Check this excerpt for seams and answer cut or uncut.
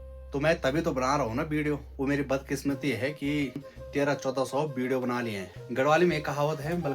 cut